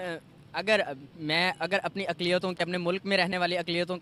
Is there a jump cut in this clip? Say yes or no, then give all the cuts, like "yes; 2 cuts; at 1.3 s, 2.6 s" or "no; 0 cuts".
no; 0 cuts